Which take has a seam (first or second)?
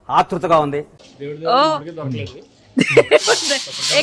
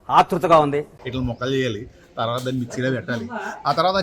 second